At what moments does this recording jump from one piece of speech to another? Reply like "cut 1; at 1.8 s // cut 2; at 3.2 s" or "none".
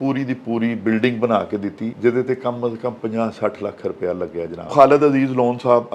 cut 1; at 1.9 s // cut 2; at 4.7 s